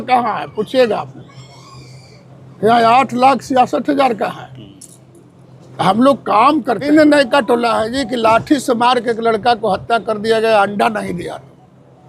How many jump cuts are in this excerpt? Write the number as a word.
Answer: one